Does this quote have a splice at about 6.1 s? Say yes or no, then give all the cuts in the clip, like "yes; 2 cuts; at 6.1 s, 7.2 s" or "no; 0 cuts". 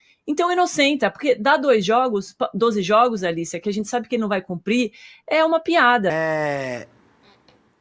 yes; 1 cut; at 6.1 s